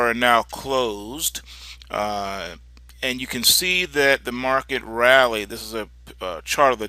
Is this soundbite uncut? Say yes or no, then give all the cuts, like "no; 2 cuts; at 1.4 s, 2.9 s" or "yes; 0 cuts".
no; 1 cut; at 5.1 s